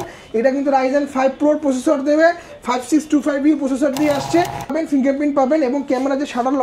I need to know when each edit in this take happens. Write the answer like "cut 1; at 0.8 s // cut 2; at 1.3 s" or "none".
cut 1; at 4.7 s